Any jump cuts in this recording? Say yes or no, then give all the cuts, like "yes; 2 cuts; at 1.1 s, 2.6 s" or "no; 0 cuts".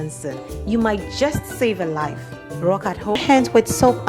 yes; 1 cut; at 3.2 s